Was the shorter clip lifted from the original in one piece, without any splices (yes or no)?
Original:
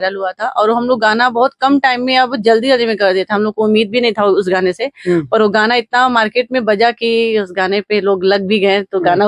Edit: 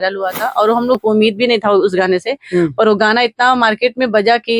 no